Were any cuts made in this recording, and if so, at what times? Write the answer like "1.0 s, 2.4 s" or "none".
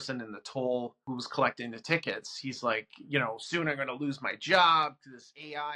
1.1 s